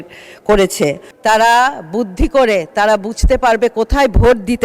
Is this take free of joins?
no; 1 cut; at 1.1 s

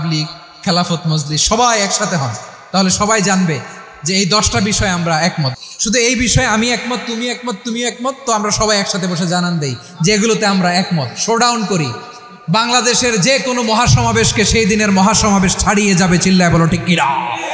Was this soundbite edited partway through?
yes; 1 cut; at 5.5 s

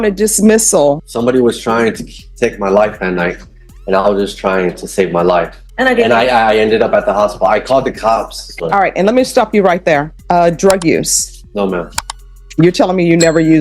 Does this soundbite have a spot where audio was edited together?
yes; 4 cuts; at 1.0 s, 5.6 s, 8.4 s, 10.1 s

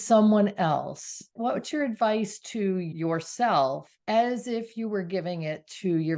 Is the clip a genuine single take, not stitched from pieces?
no; 3 cuts; at 1.4 s, 2.9 s, 3.9 s

